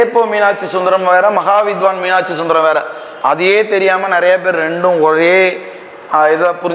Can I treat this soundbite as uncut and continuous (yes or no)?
yes